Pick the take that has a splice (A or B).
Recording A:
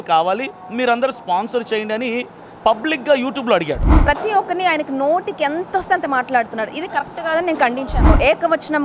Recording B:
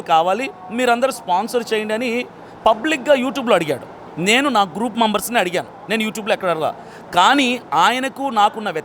A